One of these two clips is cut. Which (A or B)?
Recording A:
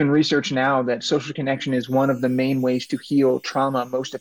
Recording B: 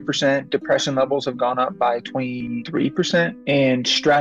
B